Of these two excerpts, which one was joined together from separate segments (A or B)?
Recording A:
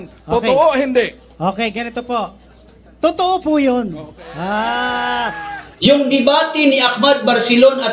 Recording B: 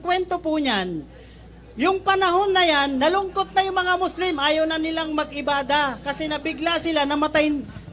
A